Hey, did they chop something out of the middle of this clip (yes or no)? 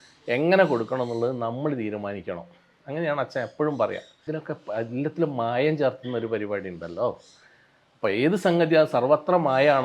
yes